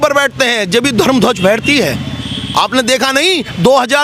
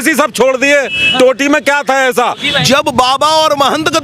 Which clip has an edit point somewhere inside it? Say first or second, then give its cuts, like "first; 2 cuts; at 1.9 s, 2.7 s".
second; 1 cut; at 2.5 s